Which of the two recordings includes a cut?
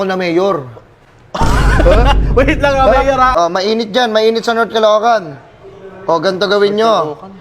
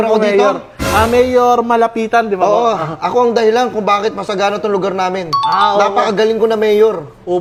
first; 1 cut; at 3.3 s

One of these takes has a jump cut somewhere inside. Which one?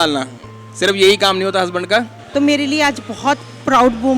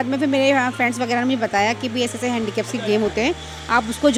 first; 1 cut; at 2.2 s

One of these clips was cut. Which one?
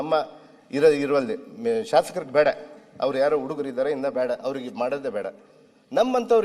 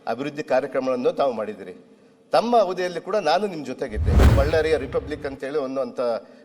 second; 1 cut; at 4.3 s

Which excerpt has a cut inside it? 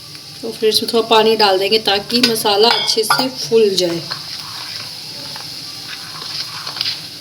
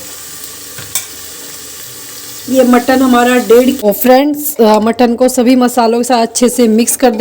second; 1 cut; at 3.8 s

